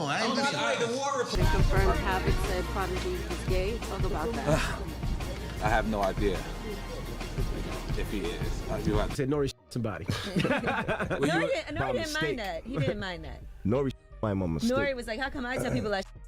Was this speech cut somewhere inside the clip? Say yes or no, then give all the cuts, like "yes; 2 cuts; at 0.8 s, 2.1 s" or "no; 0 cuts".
yes; 2 cuts; at 1.3 s, 9.1 s